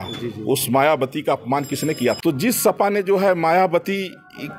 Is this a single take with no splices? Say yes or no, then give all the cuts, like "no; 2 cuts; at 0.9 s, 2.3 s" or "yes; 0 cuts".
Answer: no; 1 cut; at 2.2 s